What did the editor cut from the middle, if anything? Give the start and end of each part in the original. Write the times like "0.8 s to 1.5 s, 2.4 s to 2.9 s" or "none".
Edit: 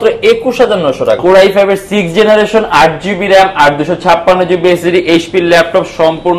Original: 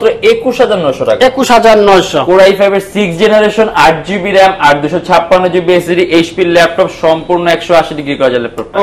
1.2 s to 2.2 s